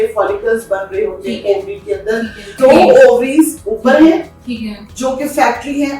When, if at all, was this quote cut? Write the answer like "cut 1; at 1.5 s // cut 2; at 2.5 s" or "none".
cut 1; at 2.6 s